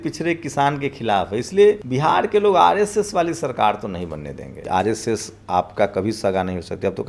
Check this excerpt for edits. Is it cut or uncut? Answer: cut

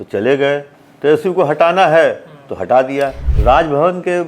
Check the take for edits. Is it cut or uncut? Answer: cut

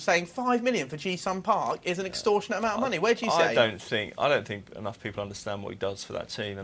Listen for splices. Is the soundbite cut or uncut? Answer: uncut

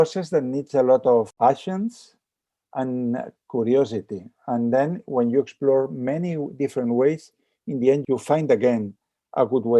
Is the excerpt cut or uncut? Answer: cut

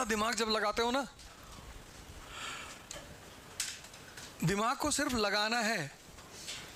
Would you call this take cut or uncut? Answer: uncut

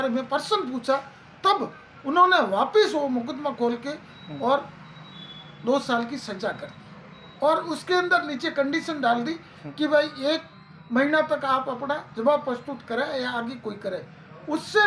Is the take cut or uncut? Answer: uncut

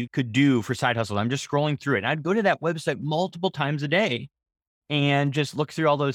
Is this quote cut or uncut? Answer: uncut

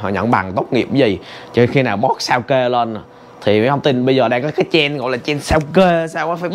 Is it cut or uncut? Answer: uncut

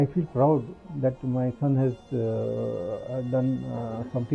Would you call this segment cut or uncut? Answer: uncut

